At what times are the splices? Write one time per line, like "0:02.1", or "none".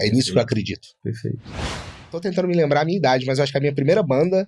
0:01.9